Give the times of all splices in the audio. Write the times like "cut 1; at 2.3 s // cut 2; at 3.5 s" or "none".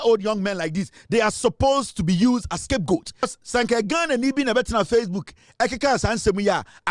cut 1; at 3.3 s